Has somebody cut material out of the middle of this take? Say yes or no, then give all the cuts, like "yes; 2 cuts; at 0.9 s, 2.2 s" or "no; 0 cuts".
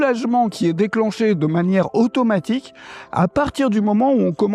no; 0 cuts